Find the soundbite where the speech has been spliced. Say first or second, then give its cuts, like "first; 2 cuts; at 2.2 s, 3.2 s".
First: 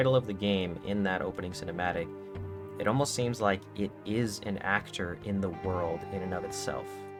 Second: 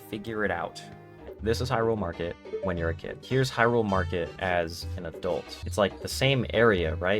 second; 4 cuts; at 1.3 s, 3.1 s, 4.3 s, 5.6 s